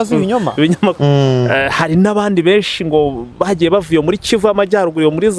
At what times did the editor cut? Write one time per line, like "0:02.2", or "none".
0:01.0